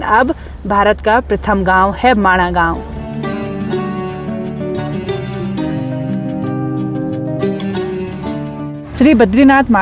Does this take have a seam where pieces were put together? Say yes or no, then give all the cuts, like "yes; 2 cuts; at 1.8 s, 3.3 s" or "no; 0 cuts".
no; 0 cuts